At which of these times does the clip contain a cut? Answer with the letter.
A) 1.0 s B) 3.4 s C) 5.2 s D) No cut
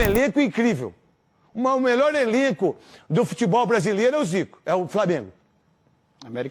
D